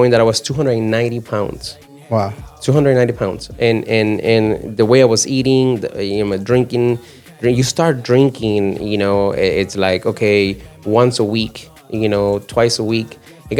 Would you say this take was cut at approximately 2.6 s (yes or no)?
no